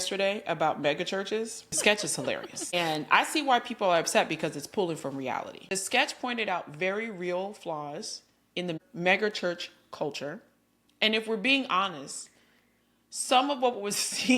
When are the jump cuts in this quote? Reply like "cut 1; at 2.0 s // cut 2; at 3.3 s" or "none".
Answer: cut 1; at 1.8 s // cut 2; at 5.6 s